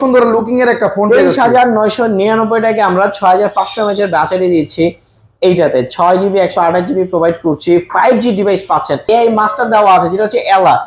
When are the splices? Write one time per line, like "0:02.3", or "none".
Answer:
0:09.0